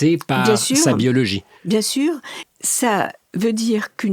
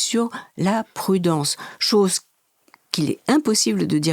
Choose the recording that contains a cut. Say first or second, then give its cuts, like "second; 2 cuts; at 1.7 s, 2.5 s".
first; 1 cut; at 2.4 s